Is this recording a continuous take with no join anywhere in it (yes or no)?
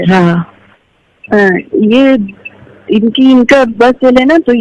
yes